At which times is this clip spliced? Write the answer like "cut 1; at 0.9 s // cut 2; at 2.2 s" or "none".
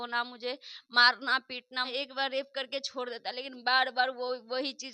cut 1; at 1.9 s